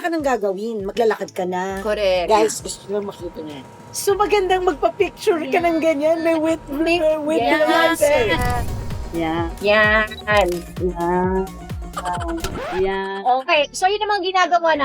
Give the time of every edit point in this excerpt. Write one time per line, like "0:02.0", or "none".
0:02.2
0:08.5

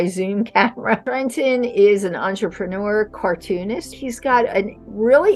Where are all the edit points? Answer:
0:01.1
0:03.9

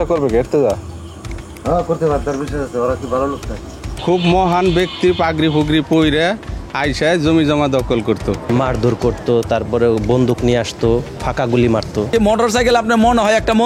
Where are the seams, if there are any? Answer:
0:03.9
0:08.4
0:12.1

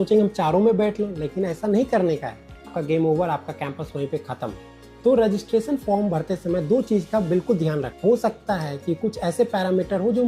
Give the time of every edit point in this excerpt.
0:02.8
0:04.7
0:07.9

